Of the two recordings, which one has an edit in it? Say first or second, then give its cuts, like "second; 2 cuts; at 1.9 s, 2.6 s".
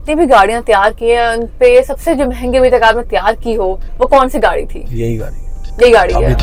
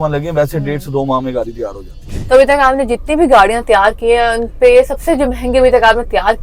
second; 1 cut; at 2.1 s